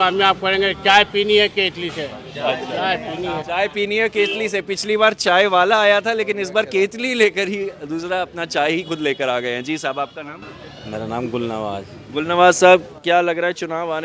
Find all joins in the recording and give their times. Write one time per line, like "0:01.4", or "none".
none